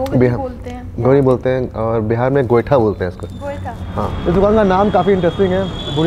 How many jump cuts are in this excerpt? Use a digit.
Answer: 1